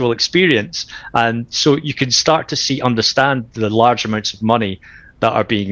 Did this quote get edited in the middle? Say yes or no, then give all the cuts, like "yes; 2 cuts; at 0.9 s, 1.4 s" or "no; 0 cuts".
no; 0 cuts